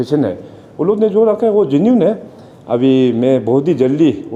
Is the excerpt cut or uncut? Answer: uncut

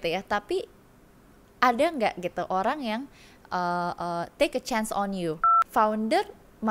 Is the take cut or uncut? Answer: cut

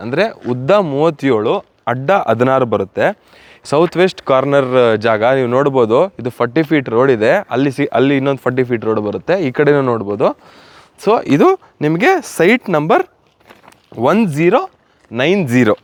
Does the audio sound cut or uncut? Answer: uncut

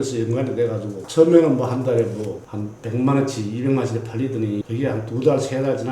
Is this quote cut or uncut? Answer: cut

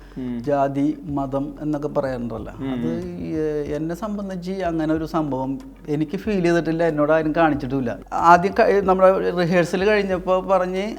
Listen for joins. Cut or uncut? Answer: cut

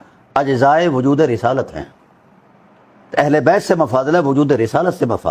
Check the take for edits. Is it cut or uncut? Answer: uncut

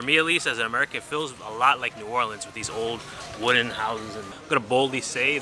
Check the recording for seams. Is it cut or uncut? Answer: cut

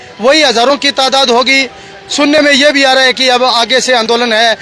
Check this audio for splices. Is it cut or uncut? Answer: uncut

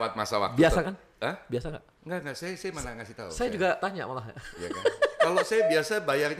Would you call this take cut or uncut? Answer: uncut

